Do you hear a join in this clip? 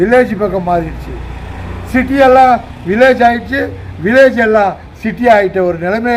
no; 0 cuts

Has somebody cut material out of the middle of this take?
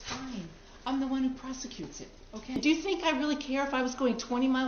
yes; 1 cut; at 2.6 s

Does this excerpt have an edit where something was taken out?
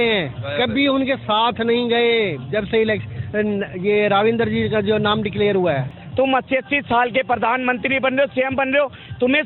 yes; 1 cut; at 6.0 s

